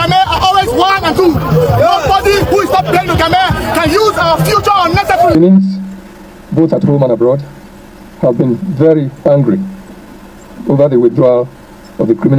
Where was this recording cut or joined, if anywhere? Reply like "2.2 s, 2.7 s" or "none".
5.3 s